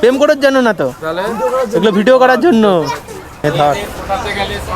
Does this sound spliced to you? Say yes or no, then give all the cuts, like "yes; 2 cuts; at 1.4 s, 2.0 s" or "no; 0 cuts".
yes; 1 cut; at 3.4 s